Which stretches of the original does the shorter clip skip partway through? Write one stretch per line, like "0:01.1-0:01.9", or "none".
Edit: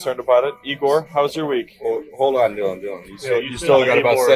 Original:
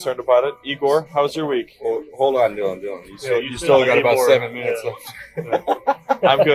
none